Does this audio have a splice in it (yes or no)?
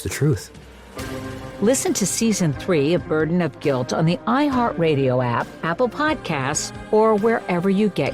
no